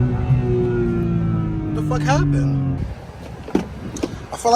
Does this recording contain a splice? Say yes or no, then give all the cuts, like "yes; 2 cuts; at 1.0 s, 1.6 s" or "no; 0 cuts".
yes; 1 cut; at 2.8 s